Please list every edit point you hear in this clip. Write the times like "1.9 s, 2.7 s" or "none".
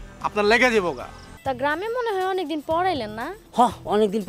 1.3 s